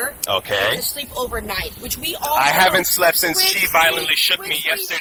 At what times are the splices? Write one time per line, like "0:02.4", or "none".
none